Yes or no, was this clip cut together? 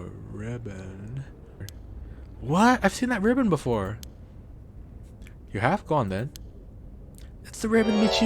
yes